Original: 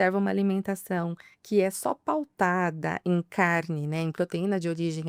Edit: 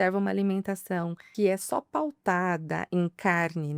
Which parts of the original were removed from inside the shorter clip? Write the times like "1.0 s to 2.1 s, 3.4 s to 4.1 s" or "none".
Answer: 1.2 s to 1.3 s